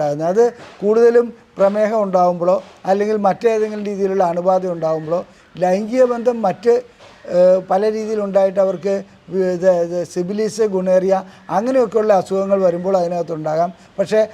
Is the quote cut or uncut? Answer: uncut